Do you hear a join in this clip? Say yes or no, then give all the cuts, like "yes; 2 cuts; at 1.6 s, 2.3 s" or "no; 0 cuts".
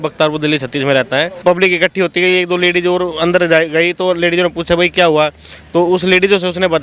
yes; 1 cut; at 1.4 s